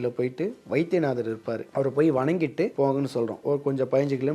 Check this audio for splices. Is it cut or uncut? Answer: cut